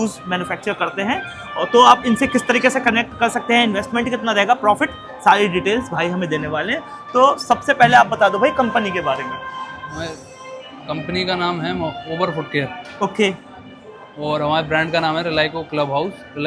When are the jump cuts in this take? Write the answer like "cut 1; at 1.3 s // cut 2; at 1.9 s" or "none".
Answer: none